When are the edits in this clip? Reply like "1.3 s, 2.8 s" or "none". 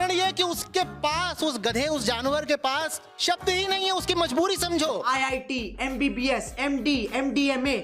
5.0 s